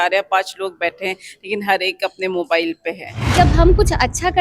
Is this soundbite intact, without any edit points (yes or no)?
no